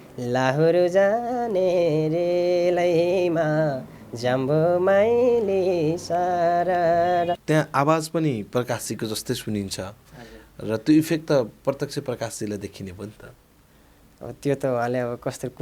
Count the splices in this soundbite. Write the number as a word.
one